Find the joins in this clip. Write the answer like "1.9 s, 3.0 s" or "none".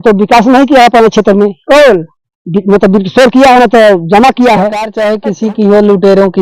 4.9 s